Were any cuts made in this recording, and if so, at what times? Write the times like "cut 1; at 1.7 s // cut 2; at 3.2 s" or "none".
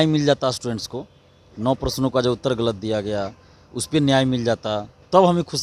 none